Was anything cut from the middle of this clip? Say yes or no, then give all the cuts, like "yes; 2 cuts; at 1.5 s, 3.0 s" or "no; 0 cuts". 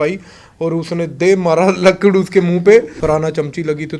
yes; 1 cut; at 2.9 s